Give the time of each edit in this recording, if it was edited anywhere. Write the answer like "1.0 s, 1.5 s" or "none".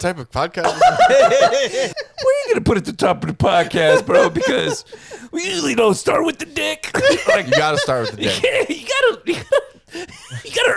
2.0 s